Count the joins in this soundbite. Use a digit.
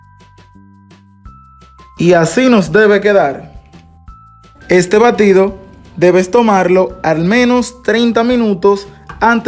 1